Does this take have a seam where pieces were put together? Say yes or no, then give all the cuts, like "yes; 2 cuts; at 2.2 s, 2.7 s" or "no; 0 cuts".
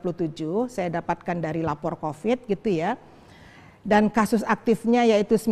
no; 0 cuts